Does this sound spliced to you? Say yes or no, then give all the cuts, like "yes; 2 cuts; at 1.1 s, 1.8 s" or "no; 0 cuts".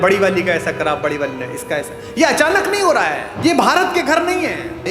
yes; 1 cut; at 3.3 s